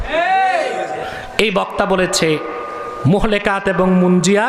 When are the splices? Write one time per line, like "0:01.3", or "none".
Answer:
0:01.1

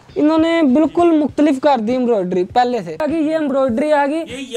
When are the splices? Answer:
0:03.0

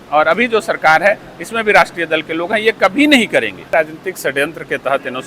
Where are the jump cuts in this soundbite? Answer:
0:03.7

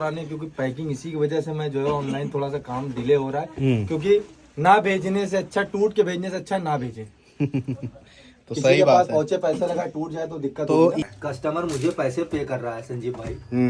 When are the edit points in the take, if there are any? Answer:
0:11.0

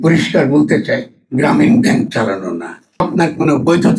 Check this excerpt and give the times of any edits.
0:03.0

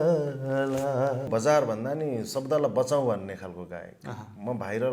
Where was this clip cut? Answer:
0:01.3

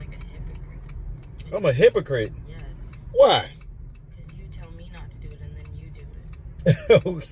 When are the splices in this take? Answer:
none

